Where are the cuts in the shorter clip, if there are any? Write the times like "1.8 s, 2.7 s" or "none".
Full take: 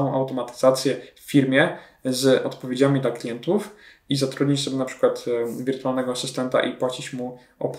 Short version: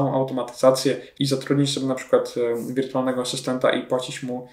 1.1 s